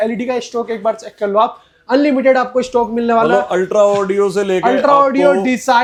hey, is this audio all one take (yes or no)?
yes